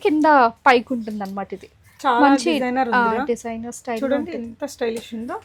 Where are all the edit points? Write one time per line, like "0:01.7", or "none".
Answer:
none